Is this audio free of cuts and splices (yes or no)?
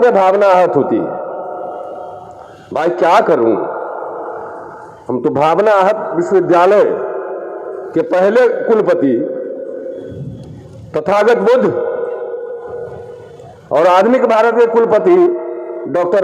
yes